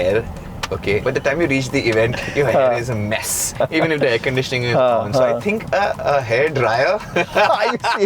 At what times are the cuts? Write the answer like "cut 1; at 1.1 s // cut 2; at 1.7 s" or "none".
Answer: cut 1; at 1.0 s // cut 2; at 3.5 s